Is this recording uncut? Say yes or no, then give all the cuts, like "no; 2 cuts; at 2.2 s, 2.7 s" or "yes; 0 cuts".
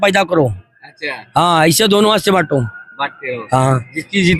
yes; 0 cuts